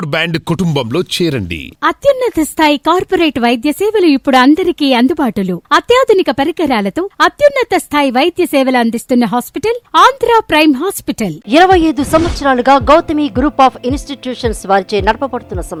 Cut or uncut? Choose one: uncut